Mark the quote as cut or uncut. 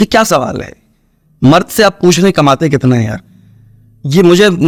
uncut